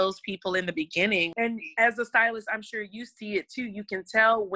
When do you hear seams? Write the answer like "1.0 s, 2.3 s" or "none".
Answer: 1.3 s